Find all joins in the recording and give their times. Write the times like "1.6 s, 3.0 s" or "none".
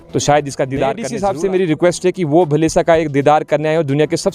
1.1 s